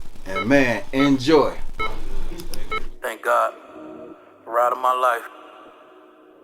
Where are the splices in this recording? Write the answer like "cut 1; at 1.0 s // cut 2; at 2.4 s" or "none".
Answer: cut 1; at 2.9 s